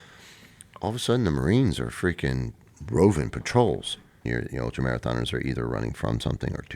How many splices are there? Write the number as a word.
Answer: one